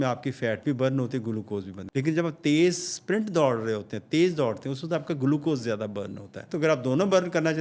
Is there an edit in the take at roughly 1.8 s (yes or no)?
yes